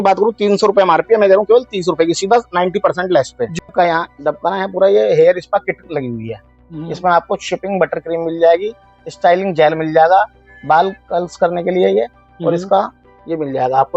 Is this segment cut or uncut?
cut